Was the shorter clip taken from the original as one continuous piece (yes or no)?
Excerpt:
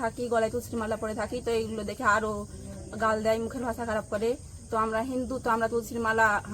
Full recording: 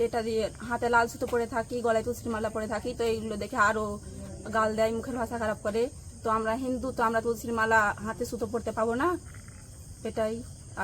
yes